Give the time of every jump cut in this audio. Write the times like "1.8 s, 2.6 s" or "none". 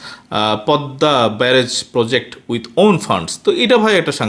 none